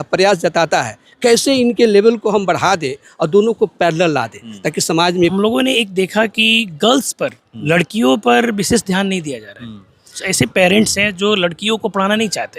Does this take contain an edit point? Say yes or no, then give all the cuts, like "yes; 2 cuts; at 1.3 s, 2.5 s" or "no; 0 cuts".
yes; 2 cuts; at 5.3 s, 10.2 s